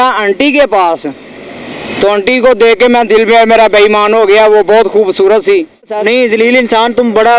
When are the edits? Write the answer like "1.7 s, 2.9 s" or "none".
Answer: 5.9 s